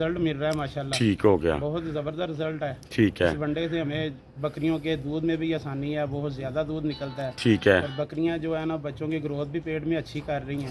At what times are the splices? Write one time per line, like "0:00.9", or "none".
none